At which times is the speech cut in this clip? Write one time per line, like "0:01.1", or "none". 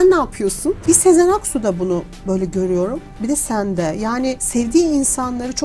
0:00.8
0:04.4